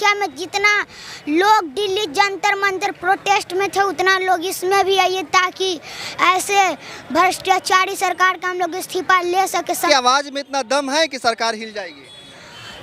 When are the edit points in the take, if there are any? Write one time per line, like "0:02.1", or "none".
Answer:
0:09.8